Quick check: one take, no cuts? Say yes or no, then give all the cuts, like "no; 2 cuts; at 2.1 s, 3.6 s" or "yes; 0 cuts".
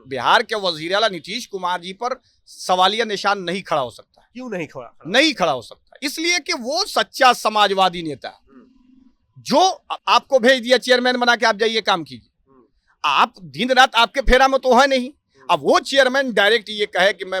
yes; 0 cuts